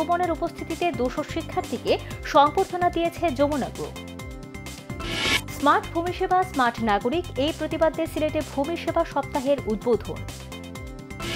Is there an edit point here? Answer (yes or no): no